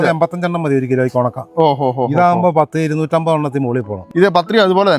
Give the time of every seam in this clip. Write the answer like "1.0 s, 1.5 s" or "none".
4.0 s